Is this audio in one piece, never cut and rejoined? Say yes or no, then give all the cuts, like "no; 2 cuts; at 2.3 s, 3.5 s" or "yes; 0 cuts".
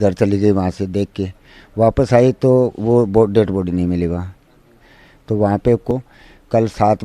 no; 1 cut; at 5.9 s